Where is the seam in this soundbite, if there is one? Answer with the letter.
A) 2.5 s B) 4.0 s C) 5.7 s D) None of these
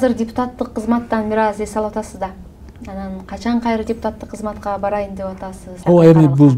C